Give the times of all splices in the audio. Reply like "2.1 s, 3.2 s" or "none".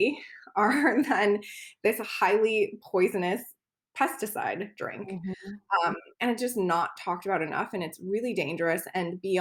none